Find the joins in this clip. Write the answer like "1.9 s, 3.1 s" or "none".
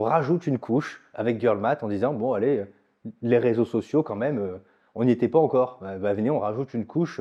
none